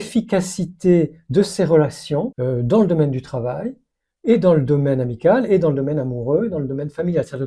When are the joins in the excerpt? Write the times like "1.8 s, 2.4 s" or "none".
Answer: 2.3 s